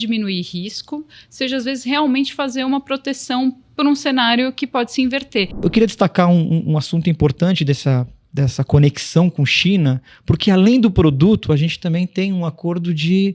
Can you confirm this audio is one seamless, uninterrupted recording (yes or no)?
no